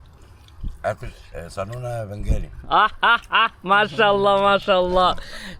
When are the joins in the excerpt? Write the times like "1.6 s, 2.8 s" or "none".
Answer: none